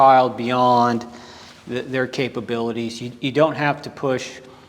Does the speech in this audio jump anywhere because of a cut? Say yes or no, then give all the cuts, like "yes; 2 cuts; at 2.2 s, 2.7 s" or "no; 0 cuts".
no; 0 cuts